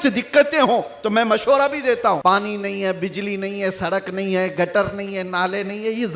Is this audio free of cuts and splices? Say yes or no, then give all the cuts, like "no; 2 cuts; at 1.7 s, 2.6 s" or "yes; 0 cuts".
no; 1 cut; at 2.2 s